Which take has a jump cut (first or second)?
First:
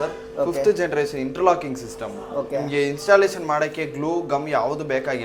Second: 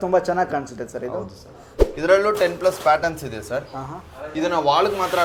second